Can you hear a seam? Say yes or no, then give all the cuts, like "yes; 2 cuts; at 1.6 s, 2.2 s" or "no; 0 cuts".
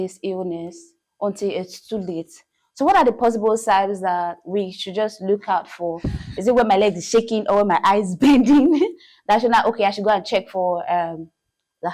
no; 0 cuts